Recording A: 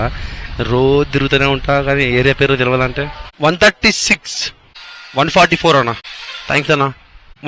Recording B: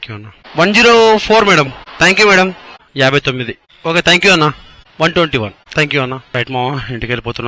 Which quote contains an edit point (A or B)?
A